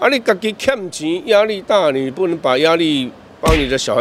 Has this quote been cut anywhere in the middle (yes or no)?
no